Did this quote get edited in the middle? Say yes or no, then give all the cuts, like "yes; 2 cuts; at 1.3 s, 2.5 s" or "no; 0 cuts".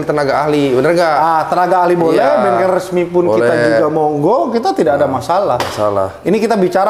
no; 0 cuts